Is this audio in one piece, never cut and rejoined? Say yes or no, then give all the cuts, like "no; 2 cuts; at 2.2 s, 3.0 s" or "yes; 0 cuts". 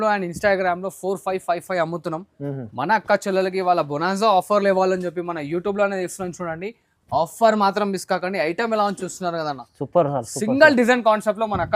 yes; 0 cuts